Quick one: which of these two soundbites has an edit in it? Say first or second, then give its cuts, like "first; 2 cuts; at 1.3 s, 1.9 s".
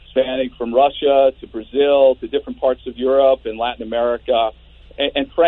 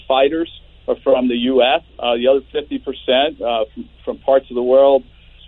second; 1 cut; at 1.9 s